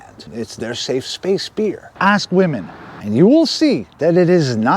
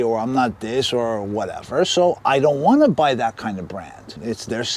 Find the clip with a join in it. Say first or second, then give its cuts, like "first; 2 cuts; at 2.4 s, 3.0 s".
first; 2 cuts; at 1.9 s, 2.9 s